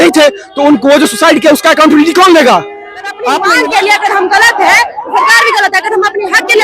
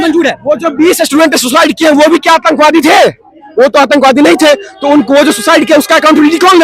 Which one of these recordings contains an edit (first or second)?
first